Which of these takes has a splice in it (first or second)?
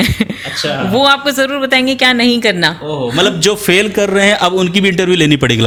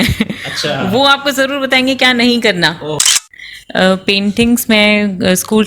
second